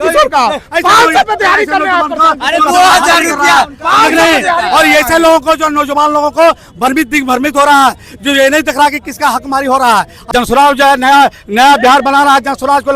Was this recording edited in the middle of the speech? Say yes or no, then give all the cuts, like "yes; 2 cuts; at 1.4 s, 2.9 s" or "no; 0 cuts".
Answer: yes; 1 cut; at 10.3 s